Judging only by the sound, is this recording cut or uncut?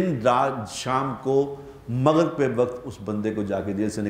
uncut